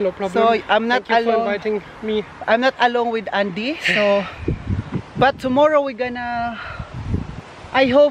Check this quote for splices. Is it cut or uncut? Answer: uncut